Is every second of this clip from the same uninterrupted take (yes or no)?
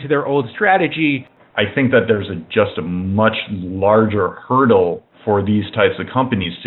no